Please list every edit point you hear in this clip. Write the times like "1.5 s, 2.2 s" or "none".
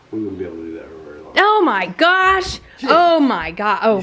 none

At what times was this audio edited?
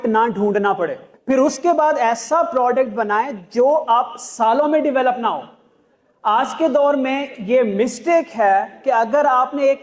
1.1 s

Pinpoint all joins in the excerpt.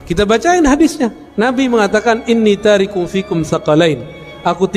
1.2 s

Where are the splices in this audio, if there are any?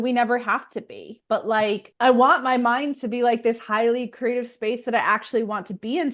1.9 s

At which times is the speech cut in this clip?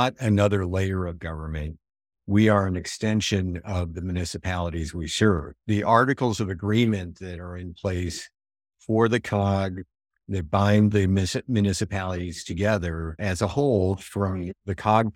none

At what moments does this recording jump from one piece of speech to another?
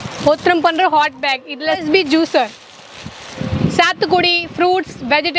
1.8 s, 3.4 s

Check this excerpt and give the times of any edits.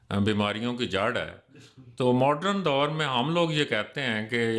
none

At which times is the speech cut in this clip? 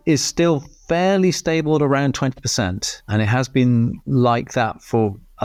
none

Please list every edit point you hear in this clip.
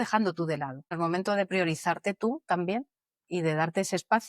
1.0 s

